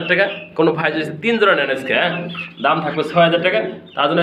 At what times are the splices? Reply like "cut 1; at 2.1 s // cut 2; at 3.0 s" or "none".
none